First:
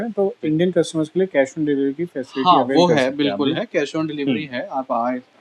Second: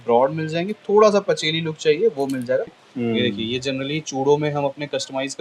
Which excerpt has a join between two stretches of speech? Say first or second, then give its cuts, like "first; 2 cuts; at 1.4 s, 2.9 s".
second; 1 cut; at 2.7 s